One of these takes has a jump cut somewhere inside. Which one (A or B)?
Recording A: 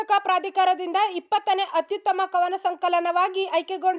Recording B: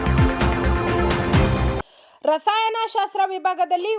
B